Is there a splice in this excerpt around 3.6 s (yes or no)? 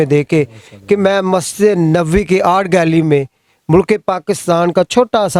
no